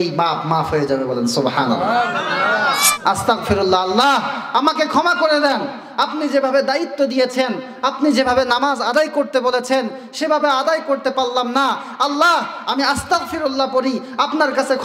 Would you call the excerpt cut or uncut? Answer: cut